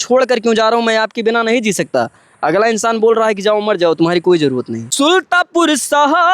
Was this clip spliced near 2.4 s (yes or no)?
no